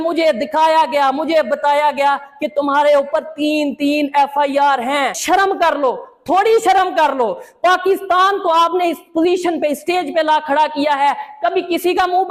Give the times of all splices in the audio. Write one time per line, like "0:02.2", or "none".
0:05.2